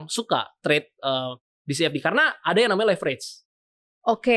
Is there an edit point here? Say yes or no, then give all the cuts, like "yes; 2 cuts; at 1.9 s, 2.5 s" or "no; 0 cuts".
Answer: no; 0 cuts